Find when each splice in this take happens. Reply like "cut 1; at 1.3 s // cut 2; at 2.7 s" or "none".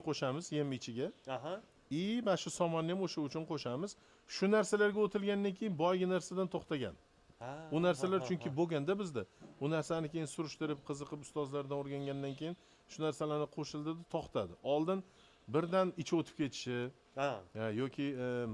none